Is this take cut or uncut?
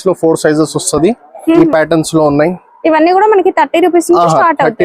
cut